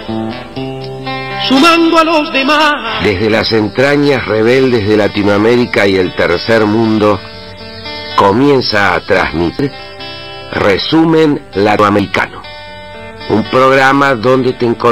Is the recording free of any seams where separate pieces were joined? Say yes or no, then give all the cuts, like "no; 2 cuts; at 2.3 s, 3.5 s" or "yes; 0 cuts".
no; 2 cuts; at 9.5 s, 11.9 s